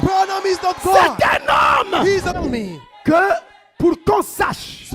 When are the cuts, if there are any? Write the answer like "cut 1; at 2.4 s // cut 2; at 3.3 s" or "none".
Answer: cut 1; at 2.3 s